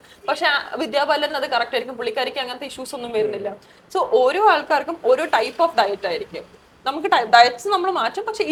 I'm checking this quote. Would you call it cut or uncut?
uncut